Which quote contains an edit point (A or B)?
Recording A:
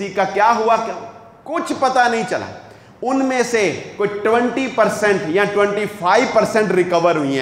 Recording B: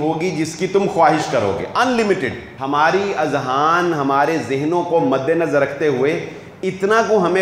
B